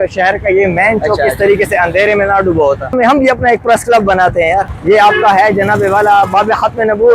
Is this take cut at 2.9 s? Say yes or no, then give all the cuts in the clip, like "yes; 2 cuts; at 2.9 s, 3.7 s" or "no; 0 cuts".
yes; 2 cuts; at 2.9 s, 4.7 s